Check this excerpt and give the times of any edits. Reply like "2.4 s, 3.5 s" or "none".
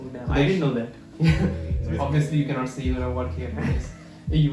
1.7 s